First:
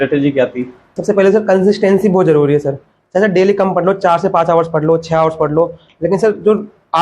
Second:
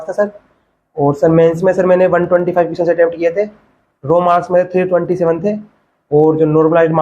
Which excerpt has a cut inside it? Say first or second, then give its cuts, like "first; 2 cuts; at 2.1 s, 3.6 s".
first; 1 cut; at 1.0 s